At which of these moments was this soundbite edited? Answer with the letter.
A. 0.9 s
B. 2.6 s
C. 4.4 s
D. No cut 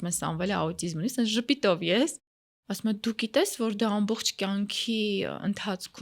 D